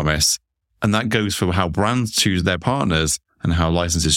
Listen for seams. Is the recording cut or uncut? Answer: cut